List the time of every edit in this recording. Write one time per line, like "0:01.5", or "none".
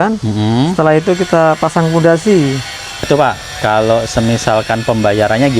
0:03.0